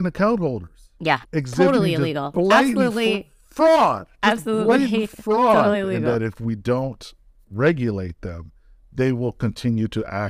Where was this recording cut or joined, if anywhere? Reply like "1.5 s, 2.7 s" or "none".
1.2 s, 6.0 s